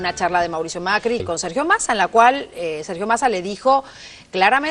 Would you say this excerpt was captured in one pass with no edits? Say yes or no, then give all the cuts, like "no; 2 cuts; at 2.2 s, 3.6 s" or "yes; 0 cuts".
no; 1 cut; at 1.2 s